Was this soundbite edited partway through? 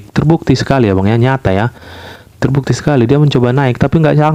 no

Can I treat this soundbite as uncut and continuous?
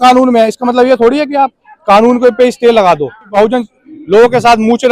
no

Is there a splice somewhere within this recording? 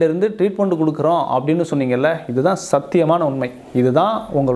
no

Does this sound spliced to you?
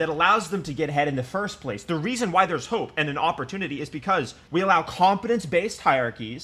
no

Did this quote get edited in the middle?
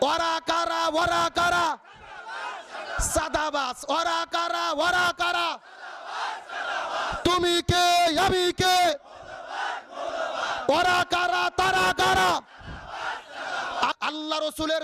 yes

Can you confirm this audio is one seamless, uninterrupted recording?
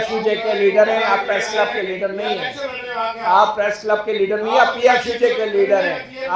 yes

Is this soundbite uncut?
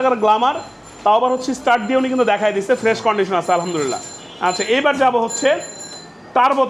yes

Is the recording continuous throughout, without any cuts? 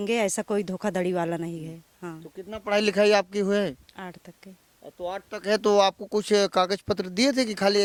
yes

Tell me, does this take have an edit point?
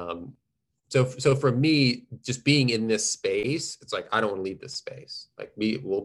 no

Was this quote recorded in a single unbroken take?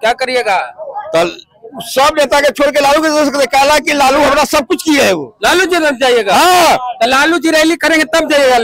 yes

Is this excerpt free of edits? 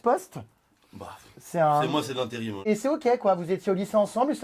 no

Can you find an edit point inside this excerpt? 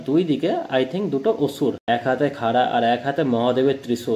yes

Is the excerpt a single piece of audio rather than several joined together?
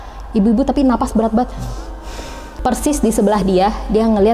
no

